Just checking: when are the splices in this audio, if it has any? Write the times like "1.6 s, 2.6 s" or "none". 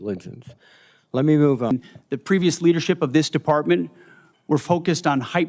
1.7 s

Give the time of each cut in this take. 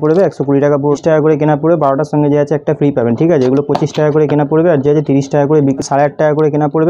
1.0 s, 5.8 s

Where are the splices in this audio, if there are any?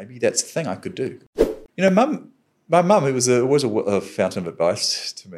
1.2 s

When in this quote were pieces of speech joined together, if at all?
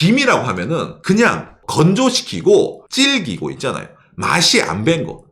1.0 s, 1.6 s, 2.8 s

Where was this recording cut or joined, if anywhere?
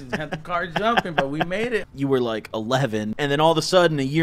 1.9 s, 3.1 s

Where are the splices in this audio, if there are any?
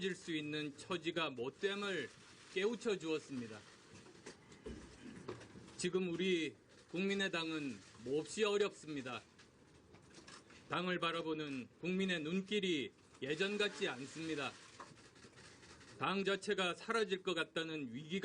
11.2 s

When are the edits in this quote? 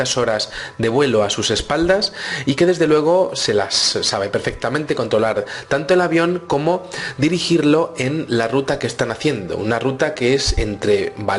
none

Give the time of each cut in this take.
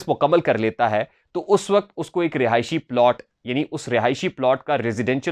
none

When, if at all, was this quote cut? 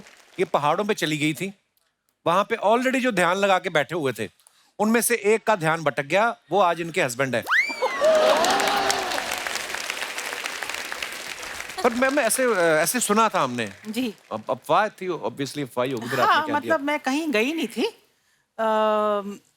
11.6 s

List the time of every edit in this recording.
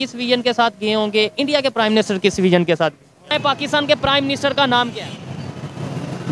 3.3 s

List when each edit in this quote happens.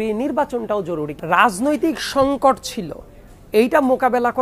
1.1 s

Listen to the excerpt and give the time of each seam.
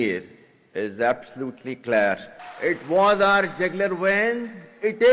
none

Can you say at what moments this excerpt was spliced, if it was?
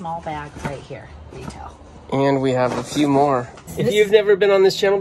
3.7 s

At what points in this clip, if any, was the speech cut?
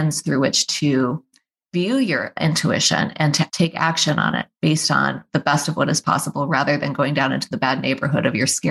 3.5 s

